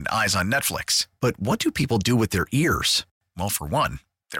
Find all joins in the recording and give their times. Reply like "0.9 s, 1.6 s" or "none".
none